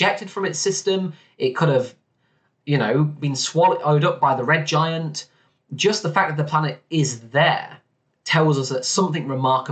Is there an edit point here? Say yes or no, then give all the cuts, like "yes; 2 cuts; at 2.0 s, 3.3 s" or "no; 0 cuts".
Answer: no; 0 cuts